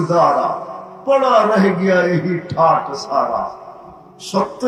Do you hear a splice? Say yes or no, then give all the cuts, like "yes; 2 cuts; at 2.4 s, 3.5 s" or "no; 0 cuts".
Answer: no; 0 cuts